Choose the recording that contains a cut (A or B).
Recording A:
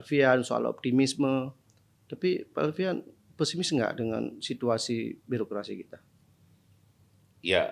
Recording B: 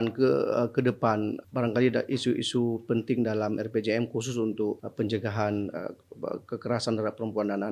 B